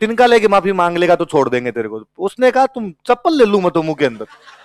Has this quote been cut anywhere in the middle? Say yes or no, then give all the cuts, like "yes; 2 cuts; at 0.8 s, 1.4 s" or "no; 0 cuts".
no; 0 cuts